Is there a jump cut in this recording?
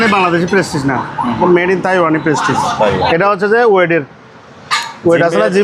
yes; 1 cut; at 3.1 s

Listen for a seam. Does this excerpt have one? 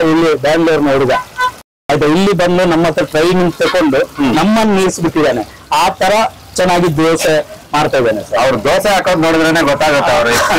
no; 0 cuts

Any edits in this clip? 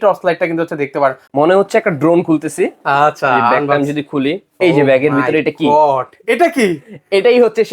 yes; 1 cut; at 1.2 s

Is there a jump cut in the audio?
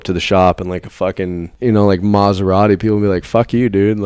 yes; 1 cut; at 1.5 s

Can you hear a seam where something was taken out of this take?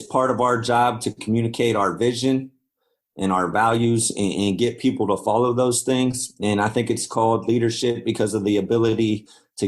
no; 0 cuts

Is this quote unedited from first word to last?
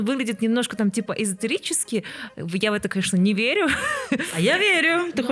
yes; 0 cuts

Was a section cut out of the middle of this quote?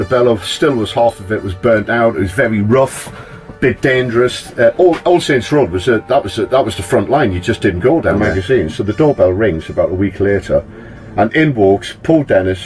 yes; 1 cut; at 8.3 s

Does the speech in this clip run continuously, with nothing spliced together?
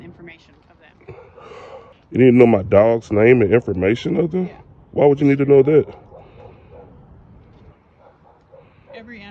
no; 1 cut; at 2.0 s

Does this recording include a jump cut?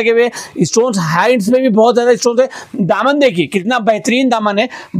no; 0 cuts

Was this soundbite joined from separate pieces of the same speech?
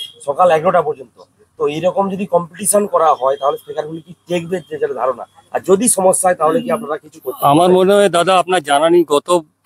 no; 0 cuts

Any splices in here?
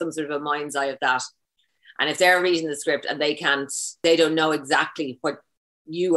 yes; 1 cut; at 4.0 s

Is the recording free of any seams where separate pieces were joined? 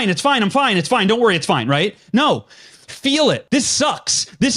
no; 1 cut; at 3.4 s

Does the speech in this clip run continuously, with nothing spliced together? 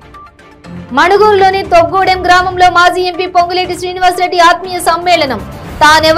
yes; 0 cuts

